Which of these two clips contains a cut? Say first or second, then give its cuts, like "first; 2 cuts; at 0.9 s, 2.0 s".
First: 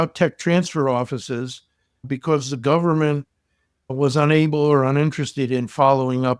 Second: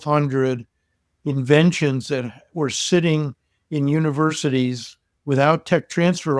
first; 1 cut; at 2.0 s